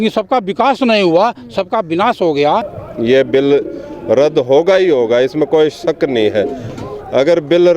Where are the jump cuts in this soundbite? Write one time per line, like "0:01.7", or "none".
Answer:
0:02.8